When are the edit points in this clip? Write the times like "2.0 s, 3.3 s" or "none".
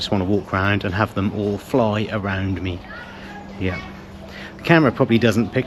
none